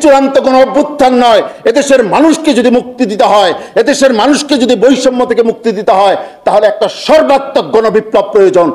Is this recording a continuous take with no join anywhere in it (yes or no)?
yes